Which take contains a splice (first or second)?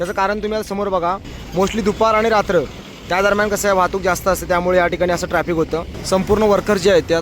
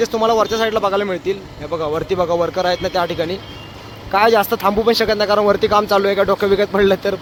first